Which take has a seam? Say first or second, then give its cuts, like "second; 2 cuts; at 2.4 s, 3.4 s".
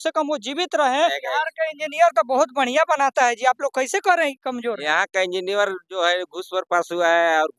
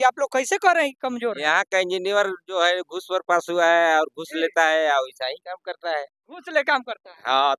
first; 1 cut; at 1.2 s